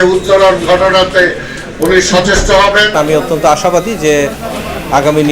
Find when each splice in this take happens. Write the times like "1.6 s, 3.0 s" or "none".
2.9 s